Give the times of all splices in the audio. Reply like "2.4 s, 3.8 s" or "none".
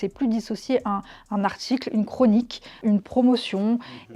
2.8 s